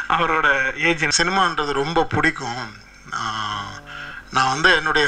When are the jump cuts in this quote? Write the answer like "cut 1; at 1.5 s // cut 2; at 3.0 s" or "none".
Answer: cut 1; at 1.1 s